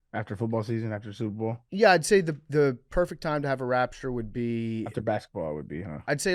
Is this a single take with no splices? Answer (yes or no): yes